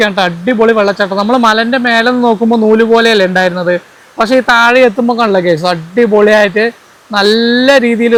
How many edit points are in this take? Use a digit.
0